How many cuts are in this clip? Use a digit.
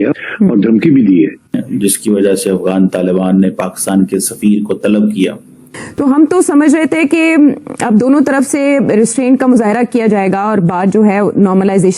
2